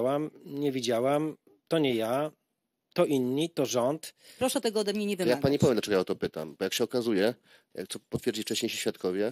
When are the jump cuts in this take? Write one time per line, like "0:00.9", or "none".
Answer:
0:04.2